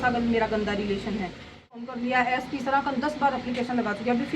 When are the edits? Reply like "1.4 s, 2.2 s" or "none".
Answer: 1.9 s